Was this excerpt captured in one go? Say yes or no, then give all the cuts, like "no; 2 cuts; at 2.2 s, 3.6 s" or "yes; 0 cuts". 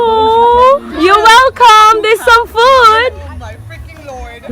no; 1 cut; at 3.3 s